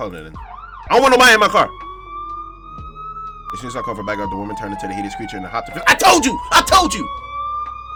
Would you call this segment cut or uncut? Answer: uncut